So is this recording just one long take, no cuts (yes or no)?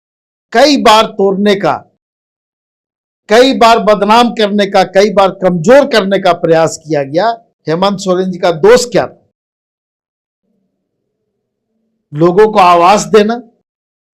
no